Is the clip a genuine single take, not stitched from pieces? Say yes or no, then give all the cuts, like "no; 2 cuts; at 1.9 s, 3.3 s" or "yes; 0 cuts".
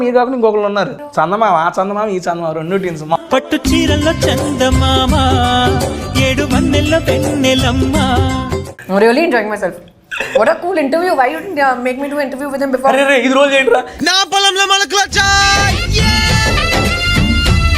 no; 3 cuts; at 1.0 s, 3.2 s, 8.7 s